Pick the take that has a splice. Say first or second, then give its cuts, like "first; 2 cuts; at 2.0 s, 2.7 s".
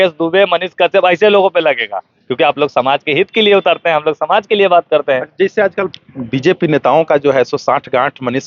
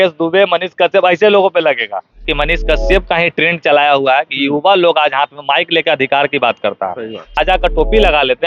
second; 2 cuts; at 2.2 s, 7.3 s